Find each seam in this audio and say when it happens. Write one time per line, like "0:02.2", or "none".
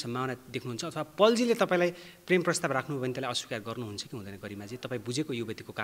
none